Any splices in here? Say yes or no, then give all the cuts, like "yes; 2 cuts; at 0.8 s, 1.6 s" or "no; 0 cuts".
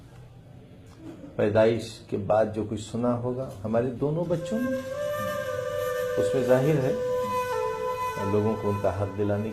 no; 0 cuts